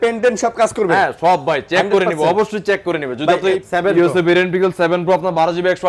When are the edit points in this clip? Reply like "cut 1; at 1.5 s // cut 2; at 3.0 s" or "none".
cut 1; at 3.7 s